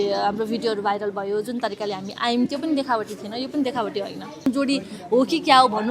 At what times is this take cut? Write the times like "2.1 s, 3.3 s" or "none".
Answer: 4.5 s